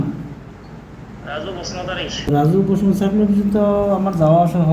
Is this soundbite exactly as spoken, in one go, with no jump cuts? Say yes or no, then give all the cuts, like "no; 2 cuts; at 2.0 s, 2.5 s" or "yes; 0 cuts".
no; 1 cut; at 2.3 s